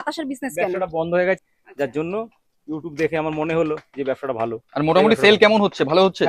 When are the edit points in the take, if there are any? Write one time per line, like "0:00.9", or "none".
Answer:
0:01.4